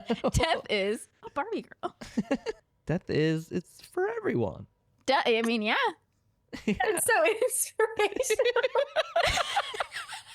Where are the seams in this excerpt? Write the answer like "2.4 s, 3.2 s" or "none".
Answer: 2.7 s